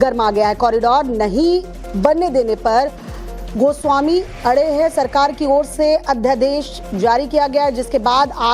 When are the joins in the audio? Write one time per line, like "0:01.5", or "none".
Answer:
0:01.8